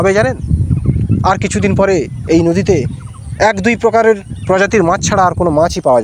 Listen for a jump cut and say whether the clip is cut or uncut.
uncut